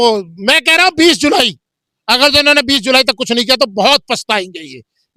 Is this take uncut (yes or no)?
yes